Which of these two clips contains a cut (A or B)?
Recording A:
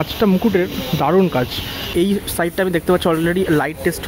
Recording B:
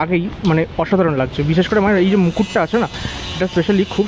A